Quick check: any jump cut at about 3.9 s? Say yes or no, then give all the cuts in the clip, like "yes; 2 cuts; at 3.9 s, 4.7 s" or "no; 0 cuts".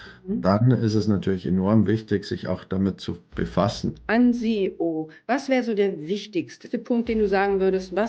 yes; 2 cuts; at 3.9 s, 6.7 s